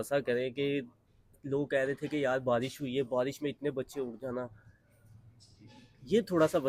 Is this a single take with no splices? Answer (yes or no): yes